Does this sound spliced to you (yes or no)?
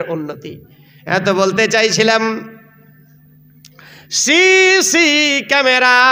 no